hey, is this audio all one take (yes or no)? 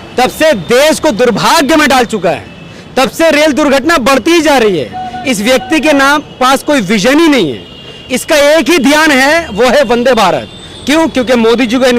yes